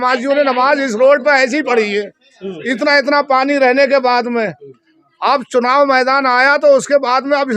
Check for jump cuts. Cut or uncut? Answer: uncut